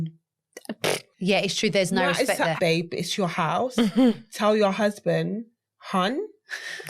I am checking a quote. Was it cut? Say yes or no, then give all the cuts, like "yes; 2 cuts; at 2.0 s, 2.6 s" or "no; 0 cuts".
yes; 2 cuts; at 1.1 s, 2.5 s